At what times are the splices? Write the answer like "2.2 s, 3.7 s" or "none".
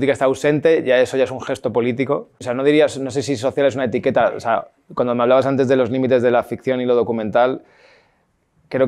2.4 s